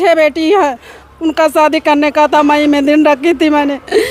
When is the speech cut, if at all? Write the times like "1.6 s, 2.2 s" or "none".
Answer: none

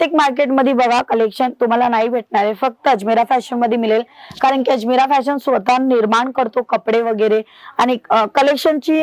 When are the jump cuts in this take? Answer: none

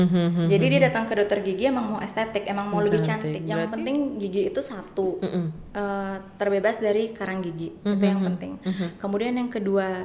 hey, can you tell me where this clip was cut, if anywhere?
3.4 s

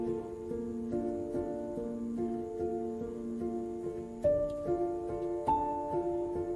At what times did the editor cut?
1.4 s

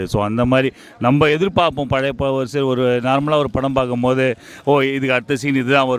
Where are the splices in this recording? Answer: none

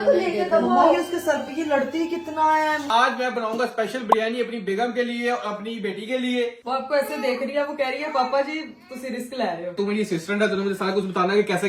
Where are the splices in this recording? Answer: 2.9 s, 6.6 s, 9.8 s

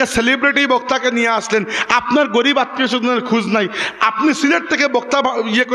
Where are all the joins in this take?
none

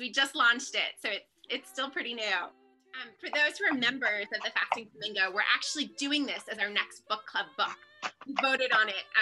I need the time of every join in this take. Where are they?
2.9 s

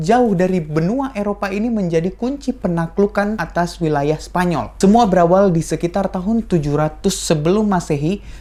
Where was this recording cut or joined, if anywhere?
none

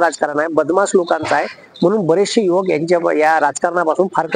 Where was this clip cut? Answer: none

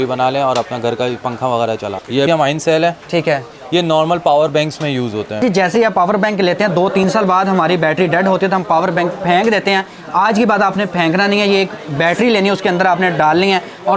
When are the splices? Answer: 2.2 s, 5.4 s

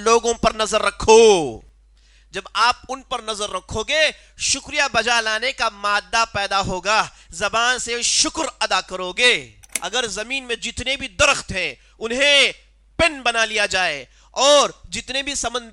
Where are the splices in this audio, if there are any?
9.7 s

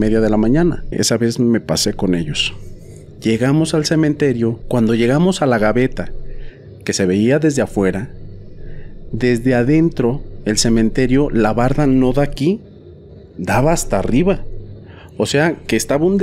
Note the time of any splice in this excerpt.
1.0 s, 4.6 s

